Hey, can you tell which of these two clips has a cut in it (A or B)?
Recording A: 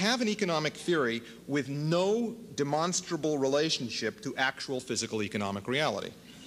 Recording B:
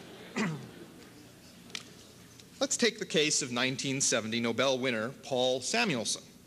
B